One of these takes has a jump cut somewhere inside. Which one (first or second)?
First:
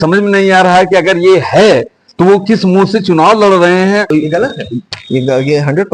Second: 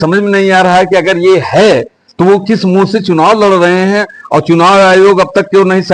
first